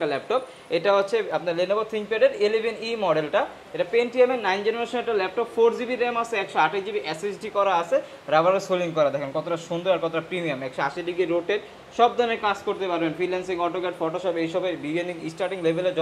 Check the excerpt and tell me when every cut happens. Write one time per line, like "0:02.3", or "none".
none